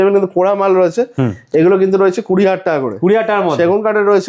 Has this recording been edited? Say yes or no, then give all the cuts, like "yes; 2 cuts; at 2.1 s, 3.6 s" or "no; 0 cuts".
no; 0 cuts